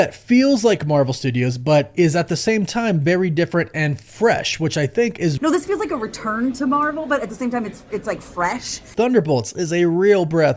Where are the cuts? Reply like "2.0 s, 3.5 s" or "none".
5.4 s, 8.9 s